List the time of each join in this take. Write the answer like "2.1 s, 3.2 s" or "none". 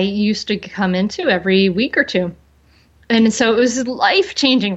none